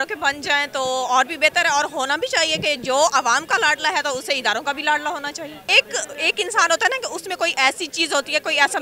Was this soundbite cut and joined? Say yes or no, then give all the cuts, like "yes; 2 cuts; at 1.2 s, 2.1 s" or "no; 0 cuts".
yes; 1 cut; at 5.6 s